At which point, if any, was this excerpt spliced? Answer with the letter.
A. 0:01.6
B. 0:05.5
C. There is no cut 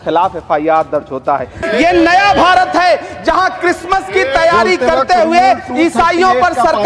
A